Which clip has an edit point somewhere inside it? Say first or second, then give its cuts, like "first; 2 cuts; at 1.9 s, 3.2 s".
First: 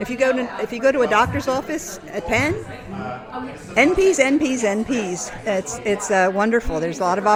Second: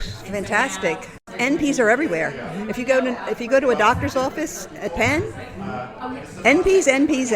second; 1 cut; at 1.2 s